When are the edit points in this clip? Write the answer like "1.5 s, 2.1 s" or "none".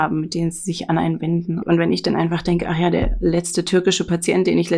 1.6 s